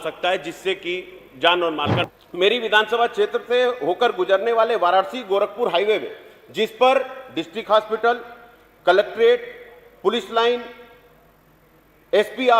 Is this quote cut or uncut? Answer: cut